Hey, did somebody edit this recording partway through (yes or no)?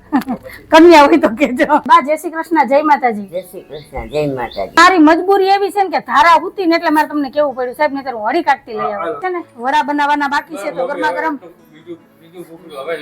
yes